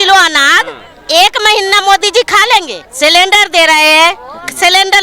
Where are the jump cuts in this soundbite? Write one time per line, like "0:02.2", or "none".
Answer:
0:02.8